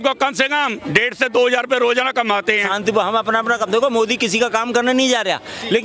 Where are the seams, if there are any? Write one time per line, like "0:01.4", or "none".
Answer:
0:02.6